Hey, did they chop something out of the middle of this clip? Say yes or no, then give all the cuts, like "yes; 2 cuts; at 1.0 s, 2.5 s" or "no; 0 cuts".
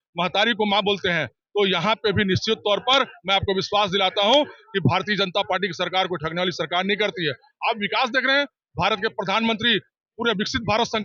no; 0 cuts